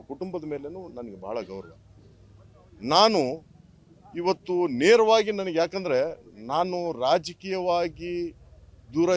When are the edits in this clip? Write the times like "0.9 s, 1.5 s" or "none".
2.0 s